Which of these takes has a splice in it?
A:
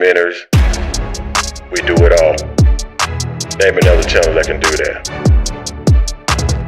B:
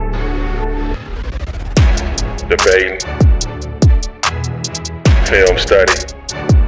A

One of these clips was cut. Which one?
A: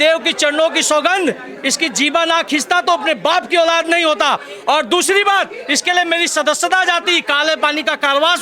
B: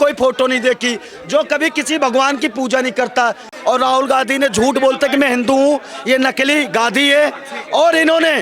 B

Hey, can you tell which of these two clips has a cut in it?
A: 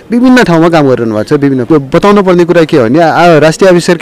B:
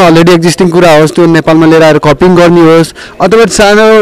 A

